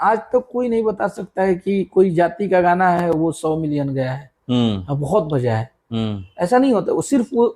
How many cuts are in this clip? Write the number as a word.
zero